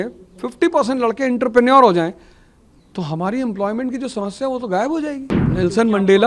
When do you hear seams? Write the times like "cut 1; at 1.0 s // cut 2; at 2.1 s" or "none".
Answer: cut 1; at 5.3 s